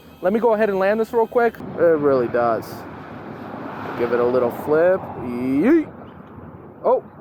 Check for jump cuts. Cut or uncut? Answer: cut